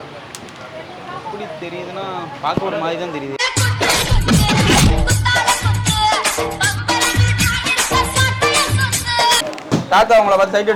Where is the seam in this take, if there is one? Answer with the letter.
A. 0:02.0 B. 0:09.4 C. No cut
B